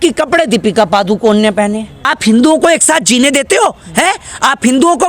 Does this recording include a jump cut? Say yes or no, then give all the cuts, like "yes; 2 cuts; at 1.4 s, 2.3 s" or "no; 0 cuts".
yes; 1 cut; at 1.9 s